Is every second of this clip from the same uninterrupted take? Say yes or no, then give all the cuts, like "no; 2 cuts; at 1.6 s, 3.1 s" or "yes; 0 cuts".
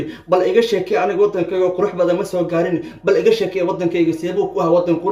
yes; 0 cuts